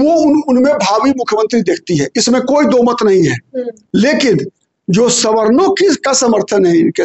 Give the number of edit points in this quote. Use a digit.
1